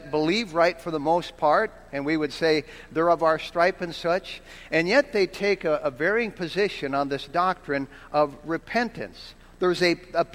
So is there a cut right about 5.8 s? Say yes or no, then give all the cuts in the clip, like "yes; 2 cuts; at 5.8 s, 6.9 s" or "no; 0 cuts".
yes; 1 cut; at 5.8 s